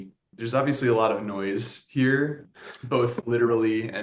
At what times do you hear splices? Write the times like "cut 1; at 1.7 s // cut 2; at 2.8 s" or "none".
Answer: none